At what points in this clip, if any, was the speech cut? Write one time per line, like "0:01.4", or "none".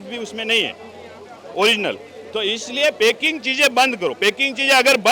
none